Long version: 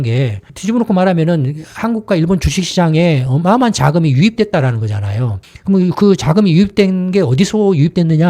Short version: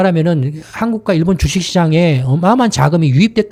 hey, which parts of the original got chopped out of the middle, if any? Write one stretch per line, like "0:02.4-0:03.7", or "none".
none